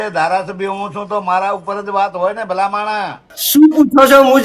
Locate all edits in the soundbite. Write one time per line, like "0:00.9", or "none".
0:03.3